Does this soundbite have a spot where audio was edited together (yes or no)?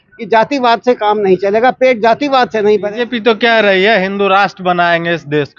yes